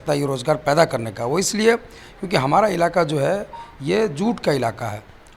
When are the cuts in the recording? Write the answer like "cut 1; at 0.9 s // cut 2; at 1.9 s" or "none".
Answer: none